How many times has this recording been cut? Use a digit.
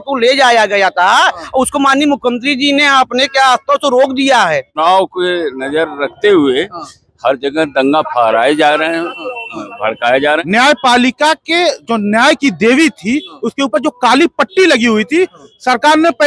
2